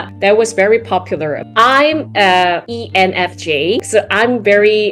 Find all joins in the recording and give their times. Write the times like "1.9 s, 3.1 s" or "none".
1.4 s, 2.7 s, 3.8 s